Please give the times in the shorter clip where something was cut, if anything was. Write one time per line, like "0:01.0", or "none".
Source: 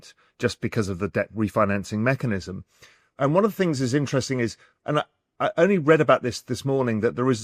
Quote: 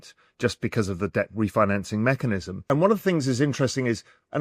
0:02.6